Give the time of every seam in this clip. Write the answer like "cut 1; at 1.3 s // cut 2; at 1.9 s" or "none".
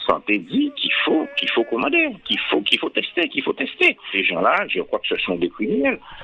cut 1; at 4.1 s